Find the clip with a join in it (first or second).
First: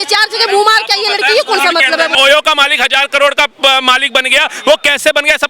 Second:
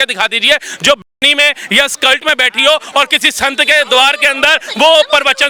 first